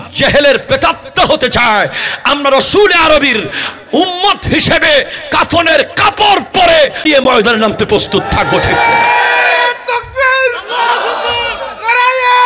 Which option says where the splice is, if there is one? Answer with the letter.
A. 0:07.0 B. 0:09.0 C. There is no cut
A